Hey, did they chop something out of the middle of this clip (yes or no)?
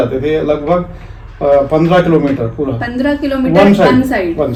no